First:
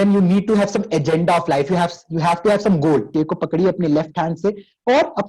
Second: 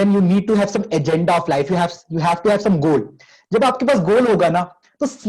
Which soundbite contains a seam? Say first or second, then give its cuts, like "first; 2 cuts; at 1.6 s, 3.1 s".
first; 1 cut; at 3.1 s